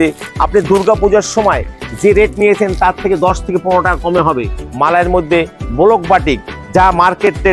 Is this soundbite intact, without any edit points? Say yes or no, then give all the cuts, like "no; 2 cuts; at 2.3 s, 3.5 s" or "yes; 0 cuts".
no; 1 cut; at 4.6 s